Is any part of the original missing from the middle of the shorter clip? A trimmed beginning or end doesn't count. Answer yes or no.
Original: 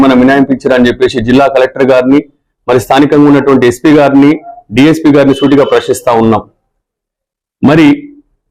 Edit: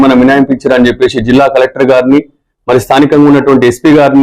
no